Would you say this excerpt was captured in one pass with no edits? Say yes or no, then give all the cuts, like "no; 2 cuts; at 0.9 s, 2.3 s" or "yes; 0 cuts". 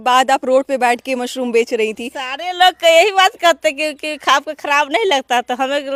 yes; 0 cuts